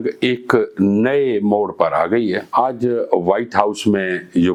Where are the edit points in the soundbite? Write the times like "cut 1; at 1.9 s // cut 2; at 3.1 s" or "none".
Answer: none